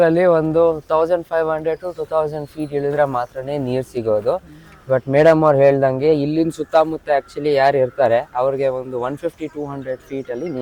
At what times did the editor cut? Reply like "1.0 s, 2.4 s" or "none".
none